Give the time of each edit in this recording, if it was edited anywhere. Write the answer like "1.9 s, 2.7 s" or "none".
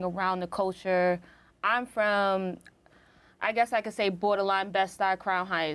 none